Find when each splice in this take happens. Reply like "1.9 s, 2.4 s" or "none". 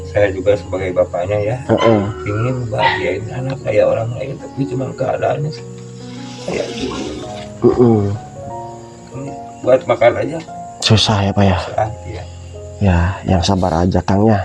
none